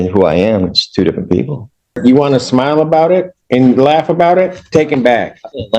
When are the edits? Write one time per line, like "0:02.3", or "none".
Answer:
0:01.9